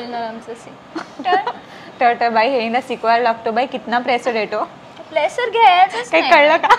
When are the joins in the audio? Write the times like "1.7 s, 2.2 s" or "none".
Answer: none